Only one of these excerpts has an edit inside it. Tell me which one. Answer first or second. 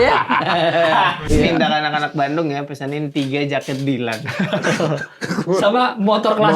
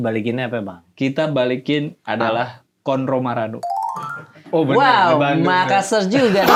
first